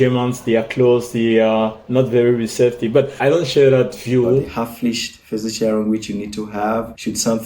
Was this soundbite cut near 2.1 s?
no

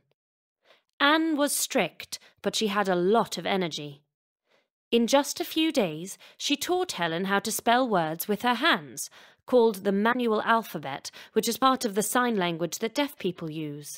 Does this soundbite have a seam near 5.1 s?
yes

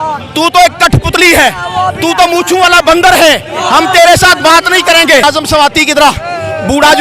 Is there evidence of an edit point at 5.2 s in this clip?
yes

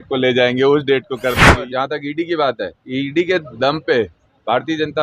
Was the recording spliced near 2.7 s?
yes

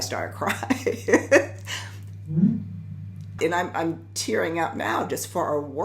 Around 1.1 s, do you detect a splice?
no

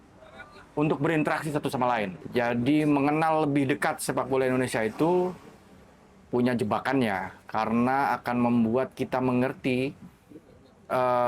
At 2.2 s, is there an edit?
yes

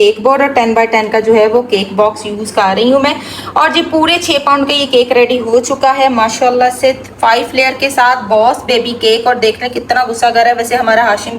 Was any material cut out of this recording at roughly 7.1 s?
yes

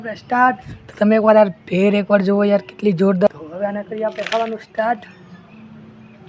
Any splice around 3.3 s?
yes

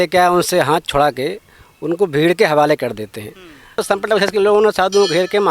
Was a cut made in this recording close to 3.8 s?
yes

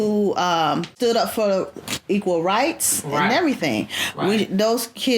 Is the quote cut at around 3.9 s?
no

